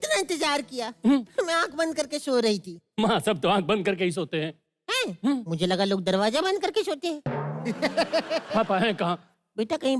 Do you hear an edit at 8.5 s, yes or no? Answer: yes